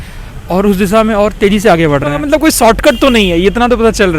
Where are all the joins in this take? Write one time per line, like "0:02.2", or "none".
0:02.2

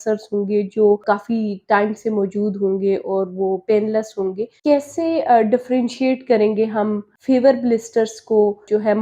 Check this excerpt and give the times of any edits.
none

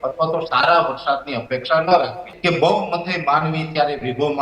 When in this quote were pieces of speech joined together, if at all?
0:02.3

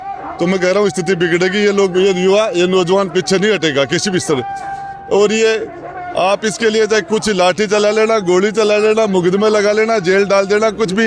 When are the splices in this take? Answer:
none

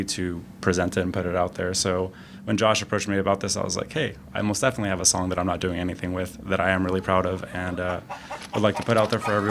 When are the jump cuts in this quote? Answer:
none

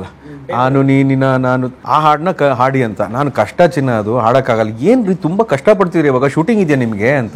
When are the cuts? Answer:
0:01.8

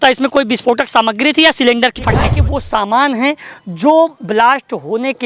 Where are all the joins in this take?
0:02.3

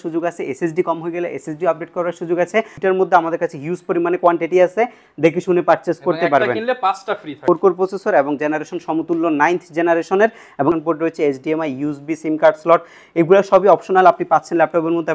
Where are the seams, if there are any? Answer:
0:02.7
0:07.4
0:10.7

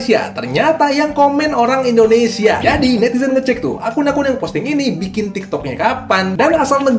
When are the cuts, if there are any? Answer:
none

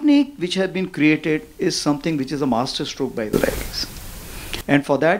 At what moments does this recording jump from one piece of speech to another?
none

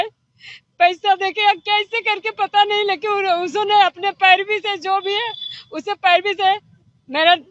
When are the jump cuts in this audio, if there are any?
none

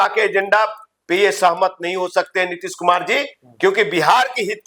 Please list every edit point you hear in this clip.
none

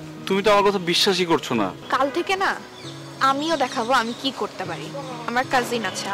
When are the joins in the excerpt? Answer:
0:01.8
0:05.3

